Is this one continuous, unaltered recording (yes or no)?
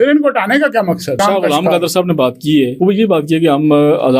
no